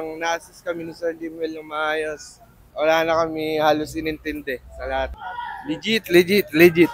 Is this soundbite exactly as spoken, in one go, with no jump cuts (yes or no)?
no